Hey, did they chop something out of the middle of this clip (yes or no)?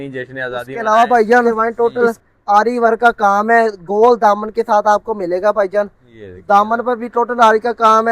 yes